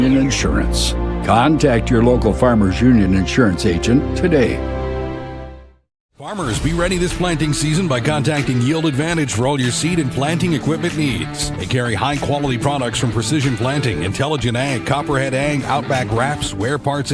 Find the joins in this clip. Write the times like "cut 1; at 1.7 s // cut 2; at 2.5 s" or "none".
cut 1; at 7.1 s